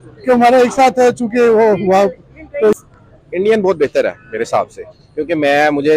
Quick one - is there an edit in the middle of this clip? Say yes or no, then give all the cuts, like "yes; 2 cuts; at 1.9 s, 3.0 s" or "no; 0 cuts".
yes; 1 cut; at 2.8 s